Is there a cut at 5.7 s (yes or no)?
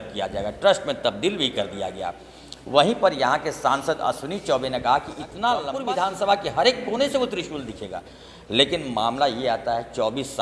yes